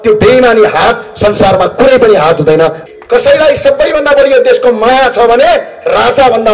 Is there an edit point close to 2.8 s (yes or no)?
yes